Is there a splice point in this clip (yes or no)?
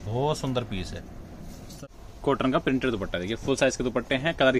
yes